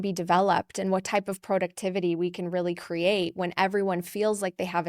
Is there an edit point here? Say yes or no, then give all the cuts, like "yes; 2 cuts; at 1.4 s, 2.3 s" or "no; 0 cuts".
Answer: no; 0 cuts